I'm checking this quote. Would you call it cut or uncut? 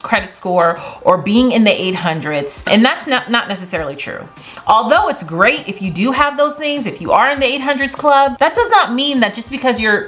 uncut